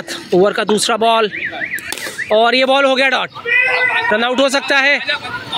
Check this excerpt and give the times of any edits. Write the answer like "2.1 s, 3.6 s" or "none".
none